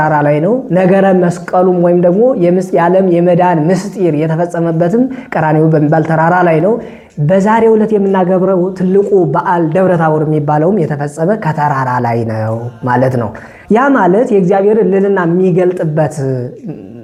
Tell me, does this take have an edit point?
no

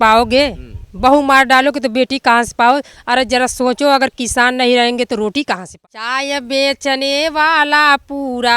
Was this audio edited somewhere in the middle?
yes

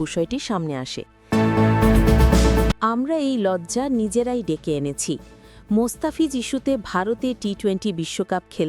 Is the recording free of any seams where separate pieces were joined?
no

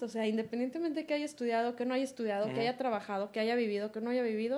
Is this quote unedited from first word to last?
yes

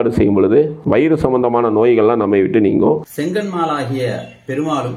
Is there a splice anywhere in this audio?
yes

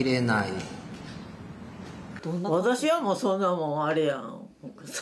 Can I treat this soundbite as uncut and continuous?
no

